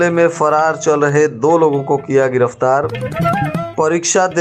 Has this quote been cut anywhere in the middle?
no; 0 cuts

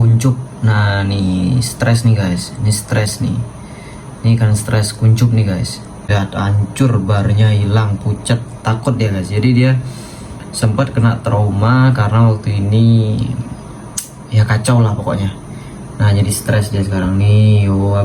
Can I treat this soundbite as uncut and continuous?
no; 1 cut; at 6.1 s

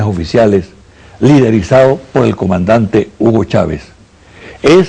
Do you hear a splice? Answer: no; 0 cuts

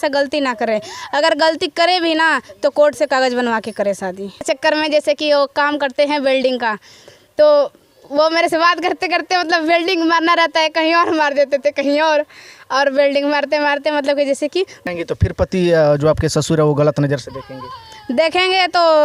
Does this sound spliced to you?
yes; 2 cuts; at 4.4 s, 14.8 s

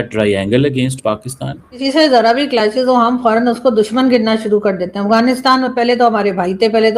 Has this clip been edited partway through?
yes; 1 cut; at 1.8 s

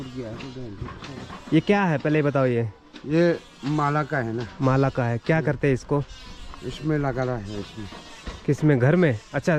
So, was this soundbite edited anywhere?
no; 0 cuts

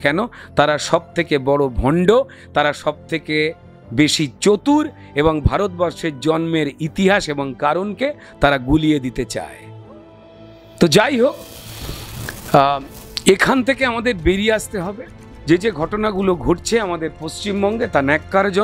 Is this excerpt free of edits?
yes; 0 cuts

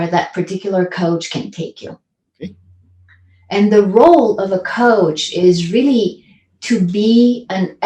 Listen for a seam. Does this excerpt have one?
no; 0 cuts

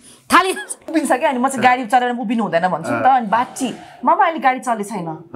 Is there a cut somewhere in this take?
yes; 1 cut; at 0.9 s

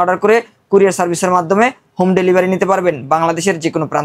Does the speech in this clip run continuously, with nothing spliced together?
yes; 0 cuts

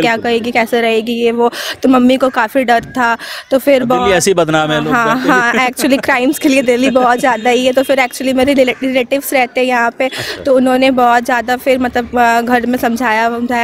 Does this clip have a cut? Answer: no; 0 cuts

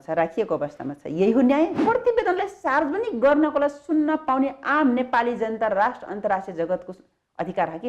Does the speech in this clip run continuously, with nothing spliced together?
no; 1 cut; at 1.8 s

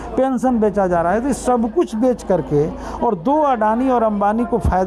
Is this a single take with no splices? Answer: yes; 0 cuts

